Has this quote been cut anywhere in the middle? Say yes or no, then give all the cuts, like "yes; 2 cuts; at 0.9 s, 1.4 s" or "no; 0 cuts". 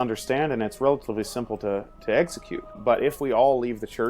yes; 1 cut; at 2.7 s